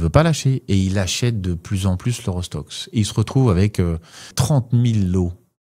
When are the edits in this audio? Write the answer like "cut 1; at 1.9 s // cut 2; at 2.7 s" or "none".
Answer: cut 1; at 4.4 s